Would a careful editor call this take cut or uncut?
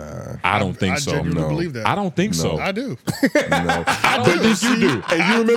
uncut